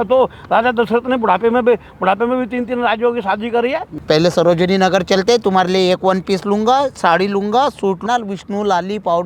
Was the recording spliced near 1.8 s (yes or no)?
no